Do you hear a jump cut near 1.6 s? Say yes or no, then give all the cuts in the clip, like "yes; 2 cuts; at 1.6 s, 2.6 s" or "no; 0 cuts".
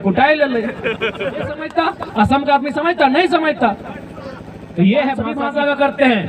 yes; 2 cuts; at 1.6 s, 5.4 s